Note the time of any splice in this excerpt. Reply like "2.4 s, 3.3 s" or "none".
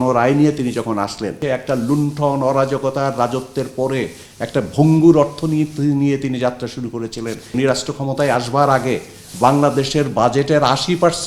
1.4 s, 7.5 s